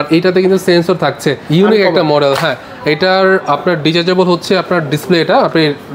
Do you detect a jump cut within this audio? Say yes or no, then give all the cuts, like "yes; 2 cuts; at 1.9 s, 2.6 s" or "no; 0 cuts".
yes; 1 cut; at 1.3 s